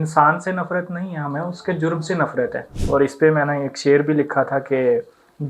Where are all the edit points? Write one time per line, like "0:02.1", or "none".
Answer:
0:02.7